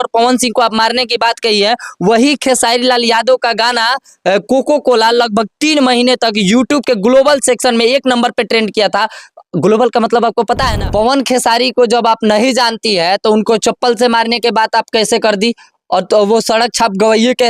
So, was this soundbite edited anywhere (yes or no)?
yes